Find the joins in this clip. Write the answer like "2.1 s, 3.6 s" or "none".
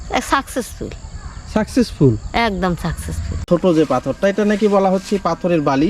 3.5 s